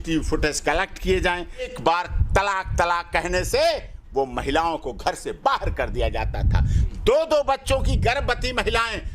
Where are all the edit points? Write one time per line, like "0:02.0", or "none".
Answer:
0:01.7